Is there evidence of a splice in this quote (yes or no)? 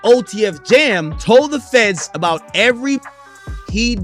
yes